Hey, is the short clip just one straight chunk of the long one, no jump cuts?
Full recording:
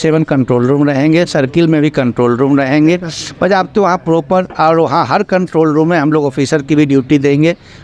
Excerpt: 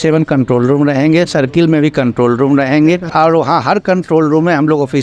no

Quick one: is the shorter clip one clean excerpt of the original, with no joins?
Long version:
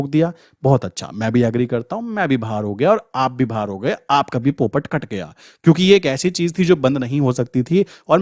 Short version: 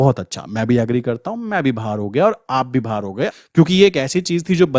no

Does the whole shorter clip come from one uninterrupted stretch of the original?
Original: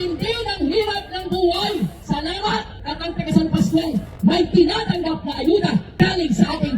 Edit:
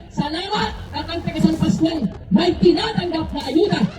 yes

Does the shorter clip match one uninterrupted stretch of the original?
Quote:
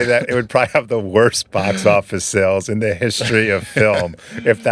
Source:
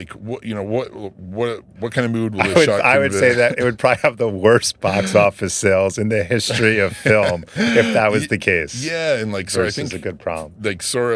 yes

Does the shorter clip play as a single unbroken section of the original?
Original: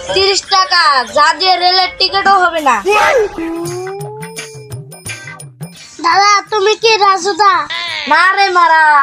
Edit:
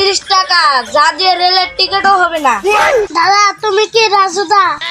no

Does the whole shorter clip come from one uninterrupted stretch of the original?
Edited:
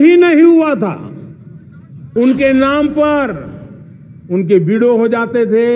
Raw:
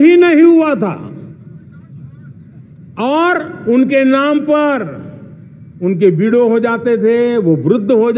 no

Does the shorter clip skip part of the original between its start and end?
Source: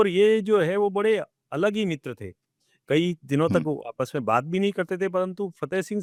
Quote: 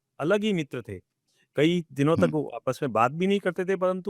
no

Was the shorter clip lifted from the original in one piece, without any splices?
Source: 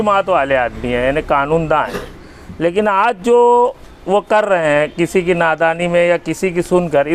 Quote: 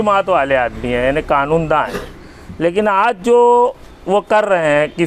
yes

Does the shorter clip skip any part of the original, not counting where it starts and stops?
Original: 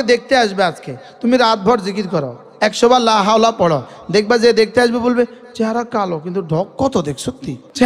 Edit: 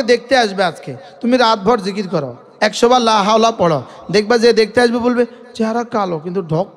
no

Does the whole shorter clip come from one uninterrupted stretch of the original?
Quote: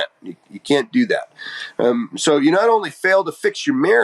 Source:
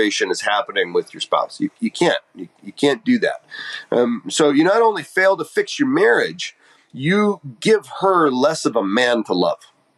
yes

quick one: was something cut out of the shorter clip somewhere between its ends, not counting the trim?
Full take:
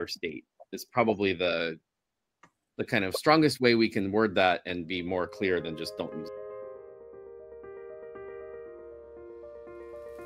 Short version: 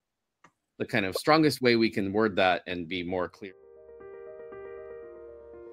yes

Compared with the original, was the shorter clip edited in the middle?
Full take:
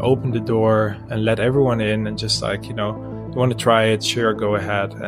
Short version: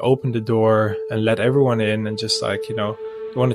no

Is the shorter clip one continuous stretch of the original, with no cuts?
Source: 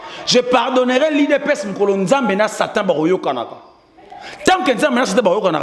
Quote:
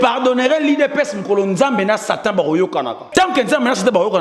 no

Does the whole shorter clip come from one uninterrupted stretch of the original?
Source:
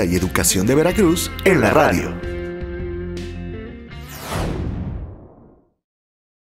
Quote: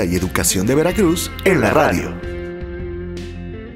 yes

